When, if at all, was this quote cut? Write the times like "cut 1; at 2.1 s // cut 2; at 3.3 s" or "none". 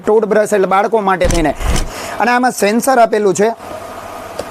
cut 1; at 1.9 s

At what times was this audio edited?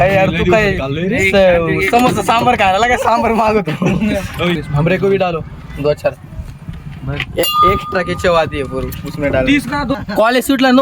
cut 1; at 4.6 s // cut 2; at 10.0 s

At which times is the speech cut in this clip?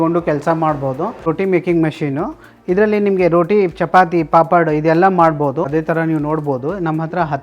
cut 1; at 1.3 s // cut 2; at 5.7 s

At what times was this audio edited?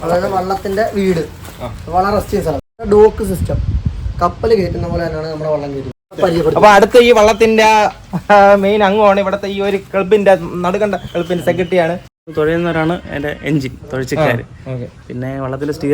cut 1; at 2.7 s // cut 2; at 6.1 s // cut 3; at 12.2 s

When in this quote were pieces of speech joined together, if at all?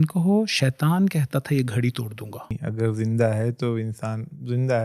cut 1; at 2.6 s

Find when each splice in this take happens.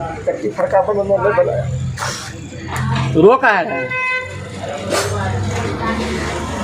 none

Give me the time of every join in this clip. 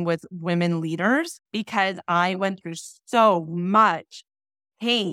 cut 1; at 1.4 s

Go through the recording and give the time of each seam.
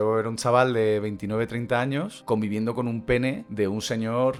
none

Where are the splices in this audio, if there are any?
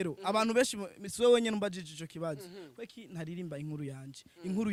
none

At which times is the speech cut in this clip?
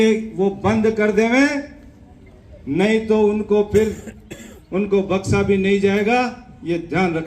none

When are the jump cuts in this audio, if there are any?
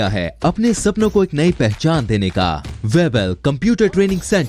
cut 1; at 2.7 s

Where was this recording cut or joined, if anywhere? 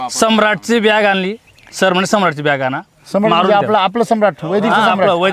none

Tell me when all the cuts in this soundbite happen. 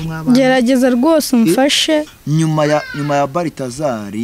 cut 1; at 2.2 s

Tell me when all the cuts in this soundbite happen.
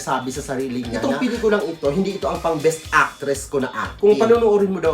cut 1; at 0.9 s // cut 2; at 3.9 s

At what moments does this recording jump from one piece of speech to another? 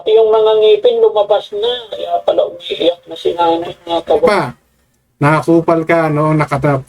cut 1; at 4.3 s

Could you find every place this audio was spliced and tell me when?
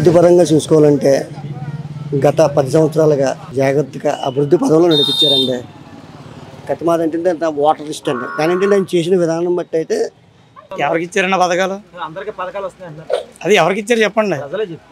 cut 1; at 3.4 s // cut 2; at 10.6 s

